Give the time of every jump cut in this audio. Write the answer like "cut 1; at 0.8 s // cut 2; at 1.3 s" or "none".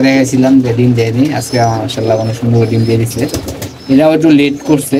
none